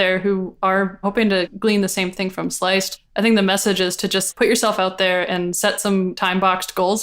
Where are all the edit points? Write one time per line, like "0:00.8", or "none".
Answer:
0:01.2
0:02.9
0:04.3
0:06.1